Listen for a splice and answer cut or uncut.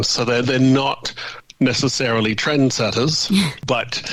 uncut